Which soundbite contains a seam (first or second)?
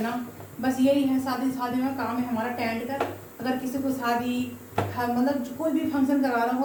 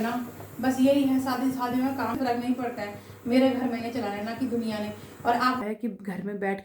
second